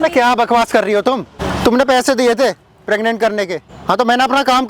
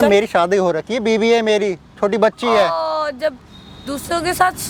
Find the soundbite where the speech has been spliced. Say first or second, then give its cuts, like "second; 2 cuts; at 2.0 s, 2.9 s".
first; 2 cuts; at 1.4 s, 3.7 s